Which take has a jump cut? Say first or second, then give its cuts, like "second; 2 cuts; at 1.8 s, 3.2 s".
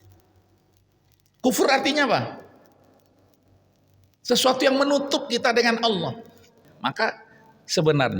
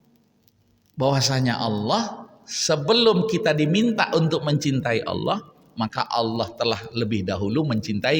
first; 1 cut; at 6.5 s